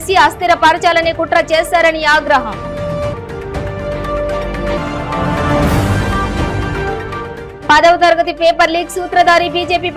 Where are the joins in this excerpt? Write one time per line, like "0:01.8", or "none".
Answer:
none